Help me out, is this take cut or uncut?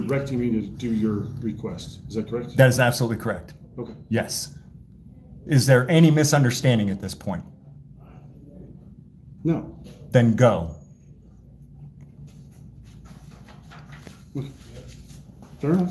uncut